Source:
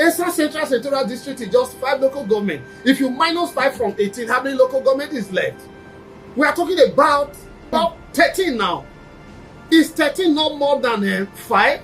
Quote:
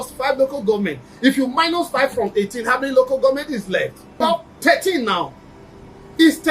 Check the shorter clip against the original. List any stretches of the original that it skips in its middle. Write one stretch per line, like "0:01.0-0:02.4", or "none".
0:05.6-0:07.5